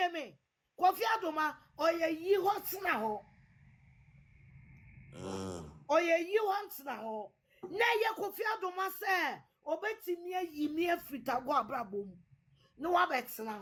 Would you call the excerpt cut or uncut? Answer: uncut